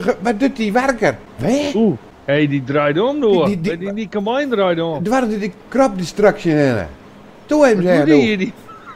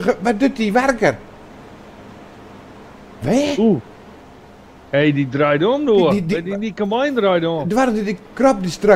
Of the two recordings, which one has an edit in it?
first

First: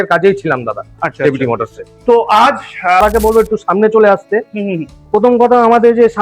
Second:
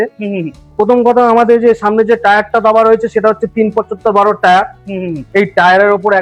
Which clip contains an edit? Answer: first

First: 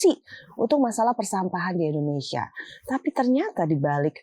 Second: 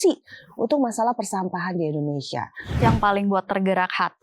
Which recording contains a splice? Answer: second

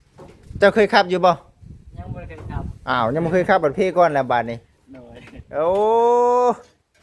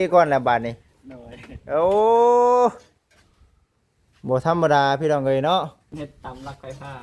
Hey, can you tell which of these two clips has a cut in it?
second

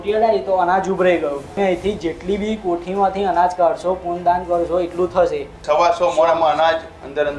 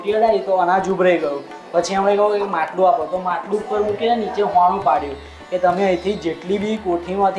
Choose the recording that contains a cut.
first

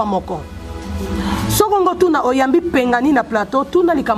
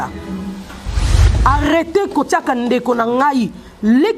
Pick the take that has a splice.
second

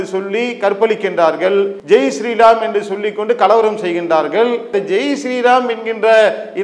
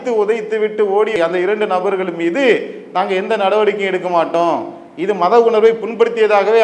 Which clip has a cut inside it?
first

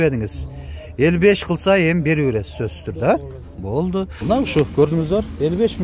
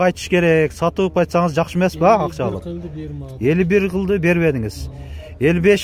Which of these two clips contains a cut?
first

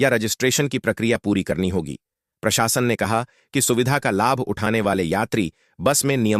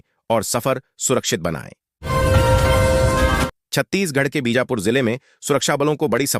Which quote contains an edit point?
second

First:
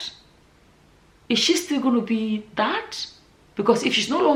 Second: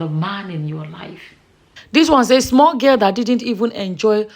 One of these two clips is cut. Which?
second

